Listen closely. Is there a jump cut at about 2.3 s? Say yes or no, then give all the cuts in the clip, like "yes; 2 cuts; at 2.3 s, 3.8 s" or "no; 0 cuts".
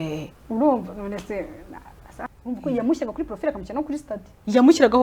yes; 1 cut; at 2.3 s